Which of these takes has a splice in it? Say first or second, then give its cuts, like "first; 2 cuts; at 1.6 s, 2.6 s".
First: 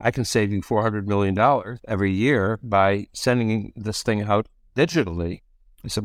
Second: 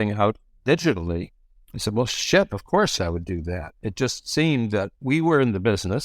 second; 2 cuts; at 3.0 s, 4.9 s